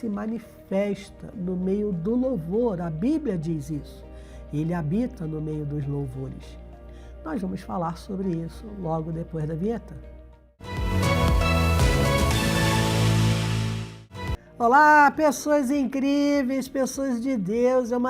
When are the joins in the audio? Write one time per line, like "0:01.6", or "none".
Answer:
0:10.8